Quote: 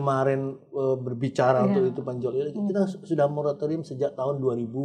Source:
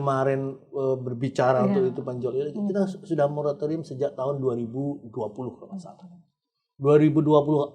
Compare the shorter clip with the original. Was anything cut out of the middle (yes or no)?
no